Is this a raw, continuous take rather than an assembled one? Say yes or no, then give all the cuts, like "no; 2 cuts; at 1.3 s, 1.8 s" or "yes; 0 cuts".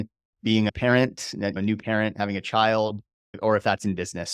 yes; 0 cuts